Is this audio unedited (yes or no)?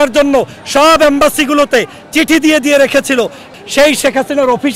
no